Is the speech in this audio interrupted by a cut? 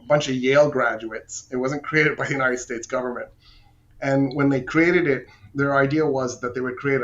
no; 0 cuts

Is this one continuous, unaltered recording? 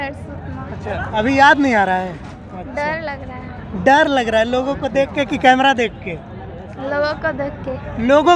yes; 0 cuts

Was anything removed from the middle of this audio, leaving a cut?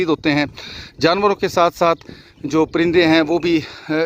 no; 0 cuts

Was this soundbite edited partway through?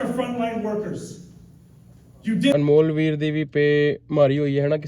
yes; 1 cut; at 2.5 s

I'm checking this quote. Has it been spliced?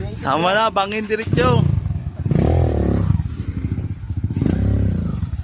no; 0 cuts

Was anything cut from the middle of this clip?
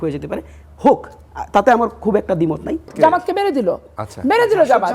yes; 1 cut; at 2.9 s

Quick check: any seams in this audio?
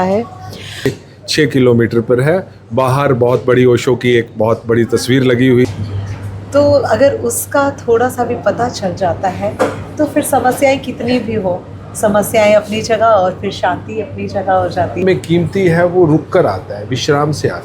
yes; 3 cuts; at 0.9 s, 5.7 s, 15.0 s

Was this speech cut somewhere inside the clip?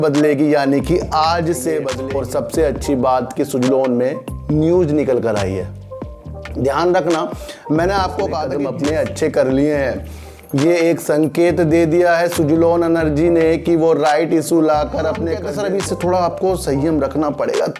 yes; 3 cuts; at 2.0 s, 8.5 s, 15.4 s

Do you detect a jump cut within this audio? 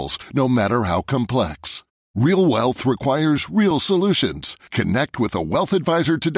no; 0 cuts

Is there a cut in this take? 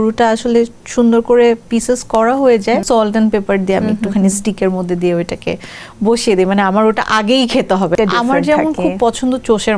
yes; 2 cuts; at 2.8 s, 7.9 s

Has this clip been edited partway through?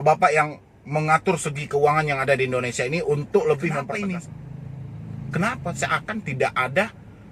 yes; 1 cut; at 3.9 s

